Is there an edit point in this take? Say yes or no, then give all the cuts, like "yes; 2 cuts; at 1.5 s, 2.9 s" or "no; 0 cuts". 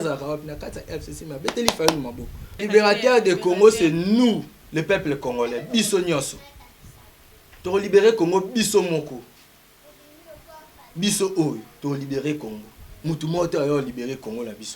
yes; 1 cut; at 2.6 s